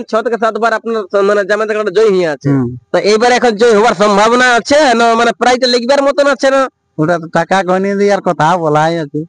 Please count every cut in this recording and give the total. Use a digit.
0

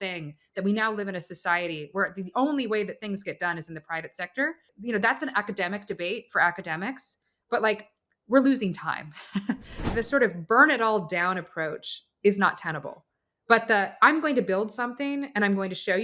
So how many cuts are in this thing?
2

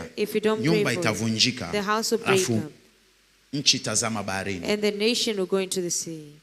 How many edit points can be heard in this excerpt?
0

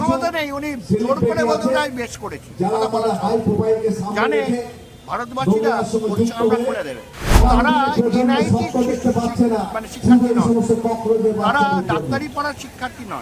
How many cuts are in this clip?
1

